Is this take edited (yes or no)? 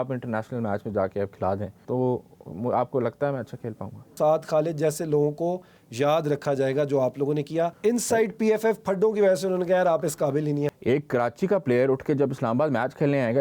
yes